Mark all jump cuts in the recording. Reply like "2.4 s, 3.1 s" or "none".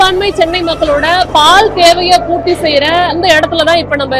3.1 s